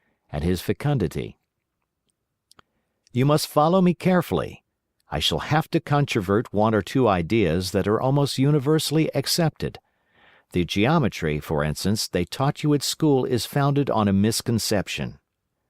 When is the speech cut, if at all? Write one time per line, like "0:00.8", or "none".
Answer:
0:05.4

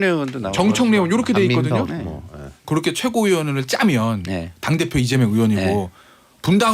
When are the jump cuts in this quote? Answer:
0:02.6

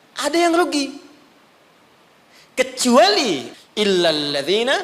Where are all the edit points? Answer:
0:03.5

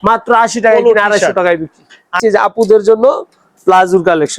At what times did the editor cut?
0:02.2

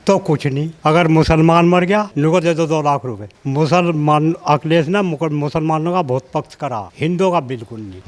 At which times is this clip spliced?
0:03.3

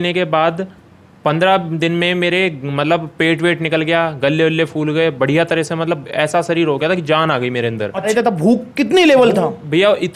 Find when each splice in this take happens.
0:08.1

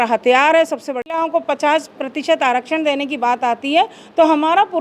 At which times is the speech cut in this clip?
0:01.1

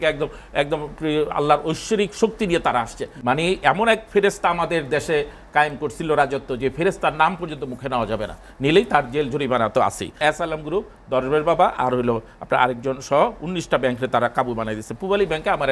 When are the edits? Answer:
0:03.0
0:10.2

